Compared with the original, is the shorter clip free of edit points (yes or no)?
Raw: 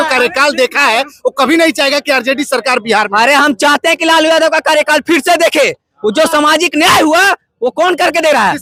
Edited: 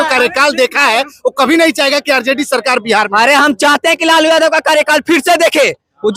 yes